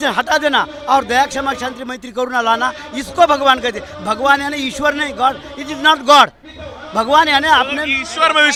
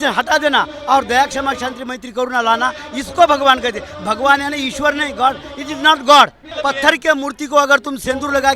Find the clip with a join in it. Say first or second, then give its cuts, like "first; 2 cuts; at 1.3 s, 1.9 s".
second; 1 cut; at 6.4 s